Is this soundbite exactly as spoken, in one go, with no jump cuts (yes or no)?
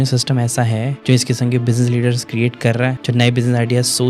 no